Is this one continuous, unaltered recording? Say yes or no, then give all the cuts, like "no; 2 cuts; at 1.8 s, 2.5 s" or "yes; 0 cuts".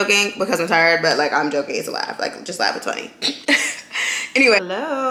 yes; 0 cuts